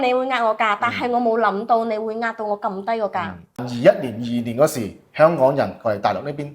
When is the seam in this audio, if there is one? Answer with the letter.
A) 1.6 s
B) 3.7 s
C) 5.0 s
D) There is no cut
B